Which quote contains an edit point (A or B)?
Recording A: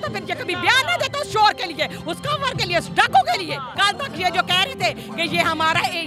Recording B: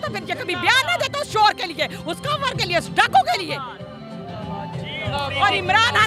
A